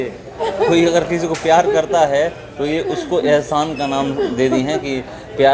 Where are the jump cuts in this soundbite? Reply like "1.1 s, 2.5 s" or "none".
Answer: none